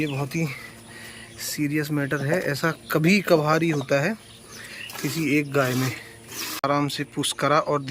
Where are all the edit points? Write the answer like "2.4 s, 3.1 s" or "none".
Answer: 6.6 s